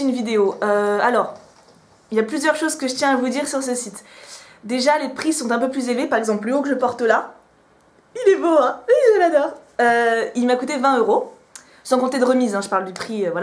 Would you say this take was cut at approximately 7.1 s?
yes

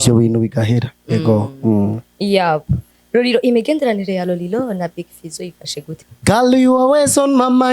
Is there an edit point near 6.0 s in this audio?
yes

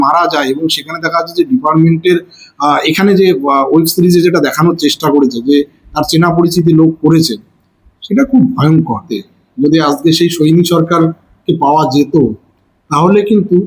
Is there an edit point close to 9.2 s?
yes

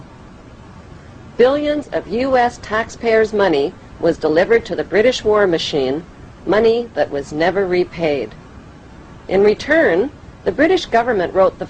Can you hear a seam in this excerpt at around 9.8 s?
yes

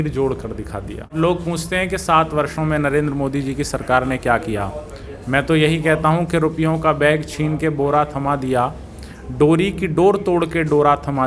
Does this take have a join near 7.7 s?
no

